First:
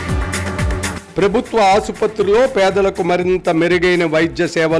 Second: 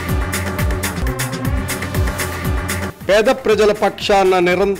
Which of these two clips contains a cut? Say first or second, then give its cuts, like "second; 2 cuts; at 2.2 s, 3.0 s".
second; 1 cut; at 0.9 s